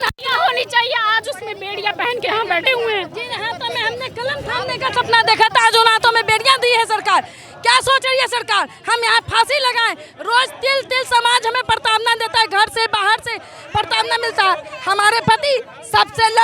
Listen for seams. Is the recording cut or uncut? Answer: uncut